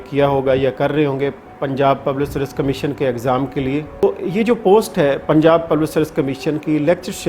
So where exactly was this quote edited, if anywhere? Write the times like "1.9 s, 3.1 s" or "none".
4.0 s

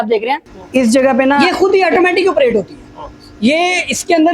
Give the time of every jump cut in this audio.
1.4 s

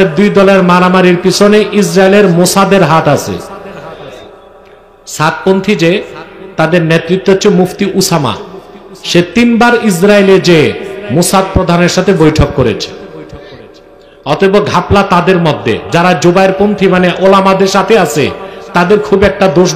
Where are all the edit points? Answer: none

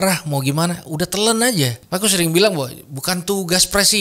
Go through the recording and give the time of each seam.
1.8 s

